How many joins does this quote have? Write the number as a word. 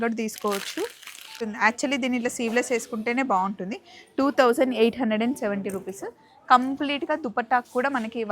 one